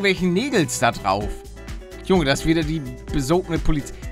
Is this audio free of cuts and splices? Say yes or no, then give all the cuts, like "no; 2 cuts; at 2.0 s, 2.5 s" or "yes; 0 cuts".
yes; 0 cuts